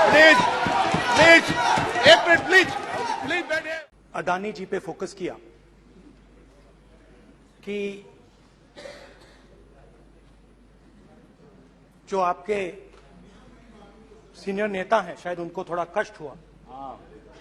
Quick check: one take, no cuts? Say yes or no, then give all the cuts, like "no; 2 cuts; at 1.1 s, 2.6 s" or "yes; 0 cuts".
no; 1 cut; at 3.7 s